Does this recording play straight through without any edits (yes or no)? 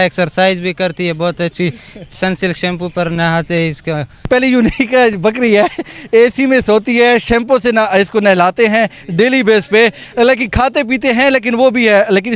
no